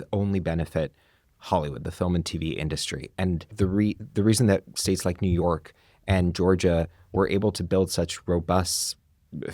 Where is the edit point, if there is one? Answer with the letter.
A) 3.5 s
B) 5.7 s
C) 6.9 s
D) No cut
A